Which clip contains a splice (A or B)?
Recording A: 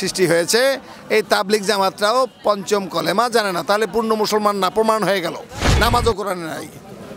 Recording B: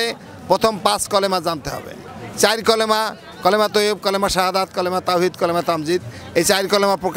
A